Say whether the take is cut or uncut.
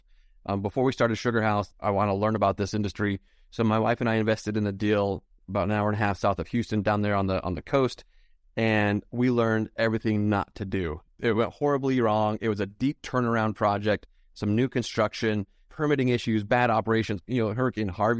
cut